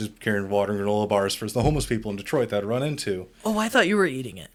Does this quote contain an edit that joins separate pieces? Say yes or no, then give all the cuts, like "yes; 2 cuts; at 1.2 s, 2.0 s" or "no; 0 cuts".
no; 0 cuts